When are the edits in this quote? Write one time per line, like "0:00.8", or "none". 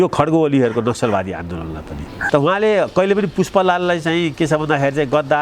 0:02.1